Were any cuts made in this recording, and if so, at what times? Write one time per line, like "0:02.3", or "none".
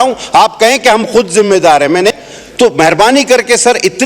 0:02.2